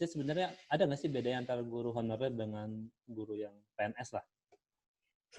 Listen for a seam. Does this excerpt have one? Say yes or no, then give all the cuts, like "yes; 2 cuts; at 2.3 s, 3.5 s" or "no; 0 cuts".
no; 0 cuts